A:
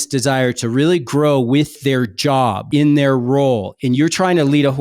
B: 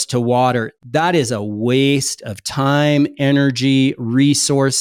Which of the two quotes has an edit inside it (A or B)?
A